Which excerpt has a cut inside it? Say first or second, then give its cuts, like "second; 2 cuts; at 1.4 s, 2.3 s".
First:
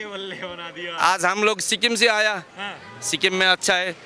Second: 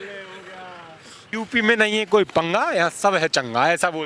second; 1 cut; at 1.3 s